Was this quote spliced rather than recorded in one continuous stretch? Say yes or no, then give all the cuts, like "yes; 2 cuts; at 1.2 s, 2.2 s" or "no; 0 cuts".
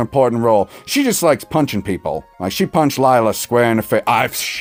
no; 0 cuts